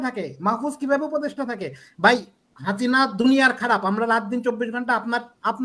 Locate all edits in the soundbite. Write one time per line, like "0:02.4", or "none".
none